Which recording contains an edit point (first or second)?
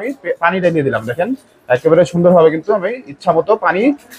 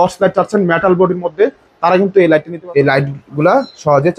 second